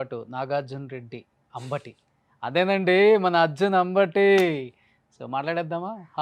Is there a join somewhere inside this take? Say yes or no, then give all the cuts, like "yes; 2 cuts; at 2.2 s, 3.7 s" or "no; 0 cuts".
no; 0 cuts